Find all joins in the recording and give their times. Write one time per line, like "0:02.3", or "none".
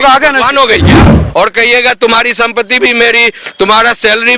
0:01.2

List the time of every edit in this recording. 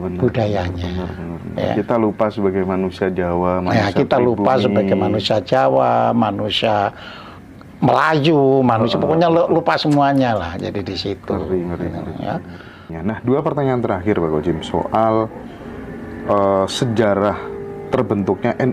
0:12.9

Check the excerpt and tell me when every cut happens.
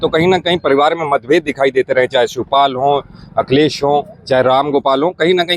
none

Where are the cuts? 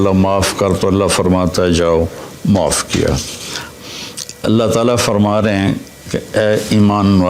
0:03.7

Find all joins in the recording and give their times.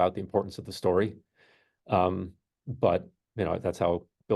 none

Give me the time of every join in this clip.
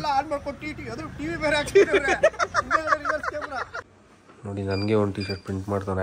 0:03.8

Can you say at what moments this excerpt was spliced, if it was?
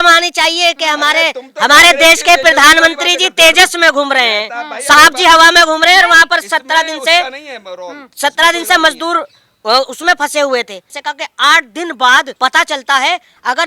0:10.9
0:12.3

